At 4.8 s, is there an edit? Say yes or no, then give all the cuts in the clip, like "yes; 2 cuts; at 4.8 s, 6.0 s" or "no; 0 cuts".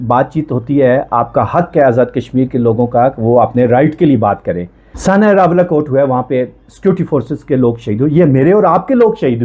yes; 1 cut; at 4.8 s